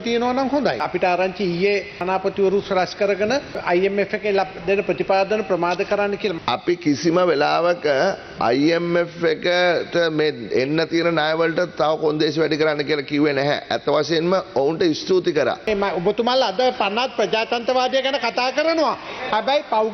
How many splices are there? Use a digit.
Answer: 5